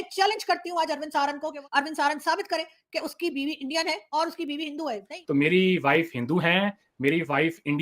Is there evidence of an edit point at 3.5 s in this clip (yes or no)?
no